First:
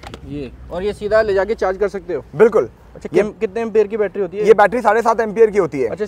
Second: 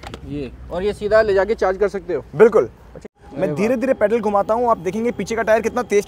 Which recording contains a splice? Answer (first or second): second